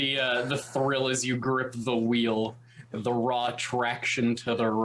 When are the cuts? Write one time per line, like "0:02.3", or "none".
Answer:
none